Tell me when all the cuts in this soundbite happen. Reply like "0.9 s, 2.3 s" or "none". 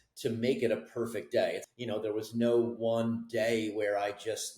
1.6 s